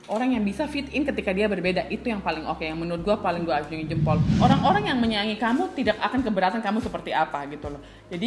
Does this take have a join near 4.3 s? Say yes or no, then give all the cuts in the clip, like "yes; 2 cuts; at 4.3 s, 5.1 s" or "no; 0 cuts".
yes; 1 cut; at 4.3 s